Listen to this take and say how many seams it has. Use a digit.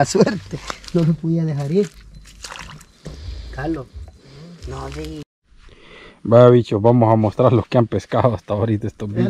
1